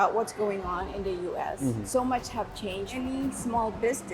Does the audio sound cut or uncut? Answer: cut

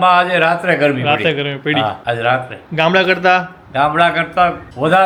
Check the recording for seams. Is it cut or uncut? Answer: uncut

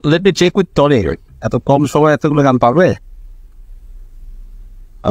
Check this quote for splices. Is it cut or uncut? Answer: uncut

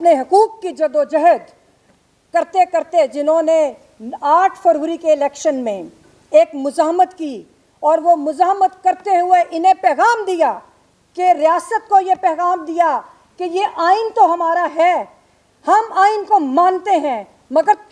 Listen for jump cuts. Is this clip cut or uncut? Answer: uncut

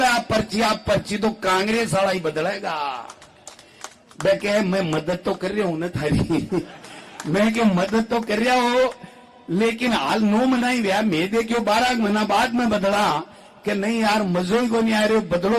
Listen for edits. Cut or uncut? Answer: uncut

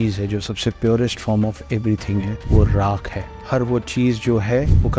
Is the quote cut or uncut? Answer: uncut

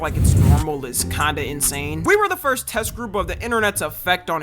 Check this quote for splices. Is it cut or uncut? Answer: uncut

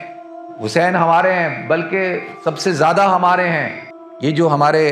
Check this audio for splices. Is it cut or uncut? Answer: cut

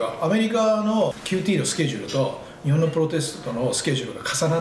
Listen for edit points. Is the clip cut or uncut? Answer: cut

